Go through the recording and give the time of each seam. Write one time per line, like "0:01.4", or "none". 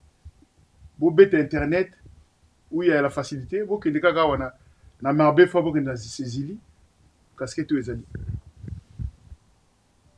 none